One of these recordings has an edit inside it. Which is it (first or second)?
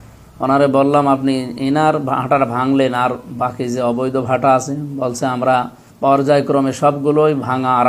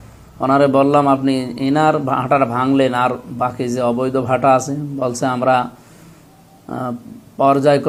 first